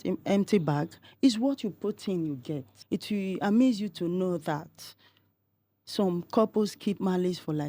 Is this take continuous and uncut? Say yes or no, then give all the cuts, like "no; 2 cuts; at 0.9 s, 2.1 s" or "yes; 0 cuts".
no; 1 cut; at 2.7 s